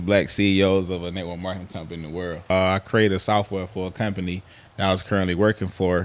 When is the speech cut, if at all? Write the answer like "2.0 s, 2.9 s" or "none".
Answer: 2.5 s